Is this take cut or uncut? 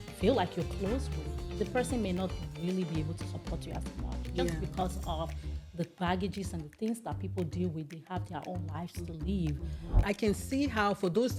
cut